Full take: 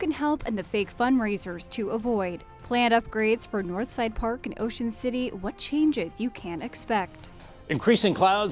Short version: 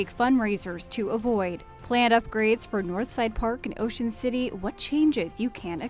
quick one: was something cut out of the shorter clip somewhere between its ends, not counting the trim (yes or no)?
no